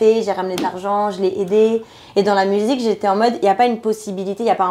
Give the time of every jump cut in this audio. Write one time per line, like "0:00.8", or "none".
none